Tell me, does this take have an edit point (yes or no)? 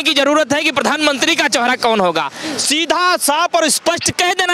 no